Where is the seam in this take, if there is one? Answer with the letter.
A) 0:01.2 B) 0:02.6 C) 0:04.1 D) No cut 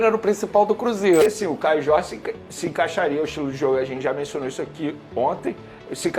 A